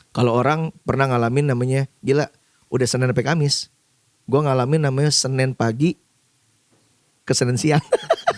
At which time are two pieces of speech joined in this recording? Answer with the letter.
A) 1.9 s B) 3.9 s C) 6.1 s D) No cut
D